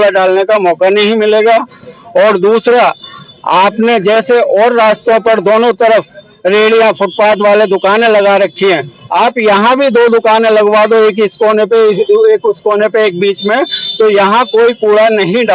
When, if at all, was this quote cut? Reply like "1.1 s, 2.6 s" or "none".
none

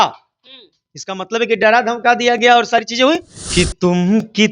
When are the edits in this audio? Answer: 3.4 s

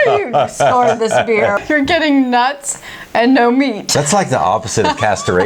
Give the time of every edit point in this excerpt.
1.6 s, 3.9 s

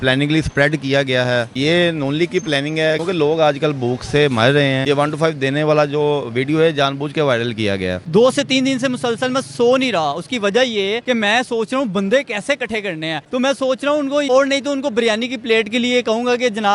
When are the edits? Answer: 3.0 s, 4.8 s, 8.0 s, 11.0 s, 13.2 s, 14.3 s

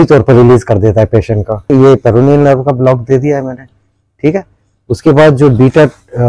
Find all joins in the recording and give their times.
1.7 s

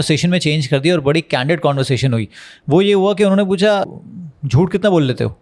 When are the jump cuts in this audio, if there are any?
4.0 s

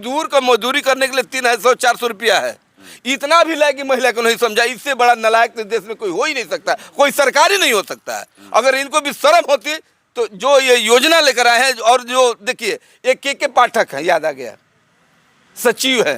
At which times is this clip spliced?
none

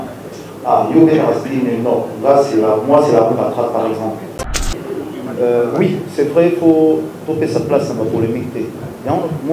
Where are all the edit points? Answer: 4.4 s

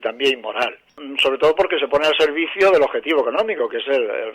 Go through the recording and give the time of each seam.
1.1 s

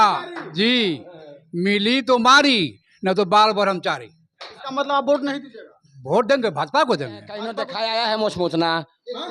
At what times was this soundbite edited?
7.6 s

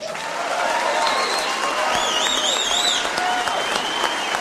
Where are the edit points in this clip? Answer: none

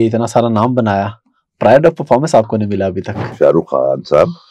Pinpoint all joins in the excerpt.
3.3 s

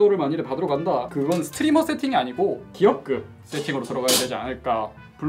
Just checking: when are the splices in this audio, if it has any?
1.1 s

